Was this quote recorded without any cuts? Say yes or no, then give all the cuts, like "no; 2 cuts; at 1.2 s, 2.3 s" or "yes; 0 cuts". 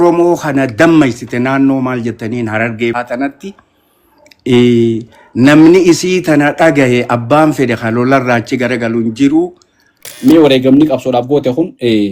no; 2 cuts; at 2.9 s, 10.2 s